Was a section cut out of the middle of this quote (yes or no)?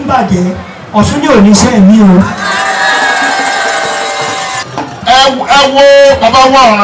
yes